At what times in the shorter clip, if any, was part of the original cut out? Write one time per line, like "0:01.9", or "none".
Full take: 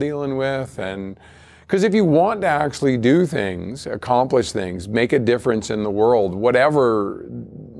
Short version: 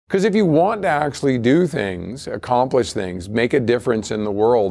none